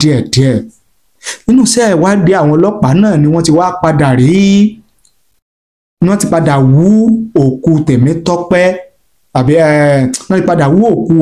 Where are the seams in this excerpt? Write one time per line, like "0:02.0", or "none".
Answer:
none